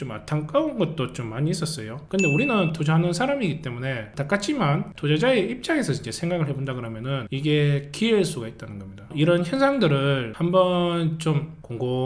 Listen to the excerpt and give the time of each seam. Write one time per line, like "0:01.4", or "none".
0:04.9